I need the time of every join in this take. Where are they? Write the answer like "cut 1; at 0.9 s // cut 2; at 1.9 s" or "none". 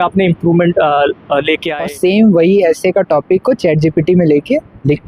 cut 1; at 1.7 s